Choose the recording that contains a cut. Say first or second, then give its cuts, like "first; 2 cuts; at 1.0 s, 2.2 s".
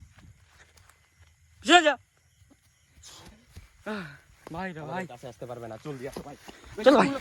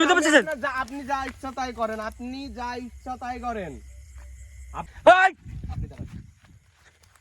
second; 1 cut; at 4.9 s